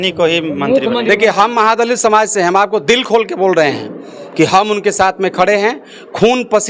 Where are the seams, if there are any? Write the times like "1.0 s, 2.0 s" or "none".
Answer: none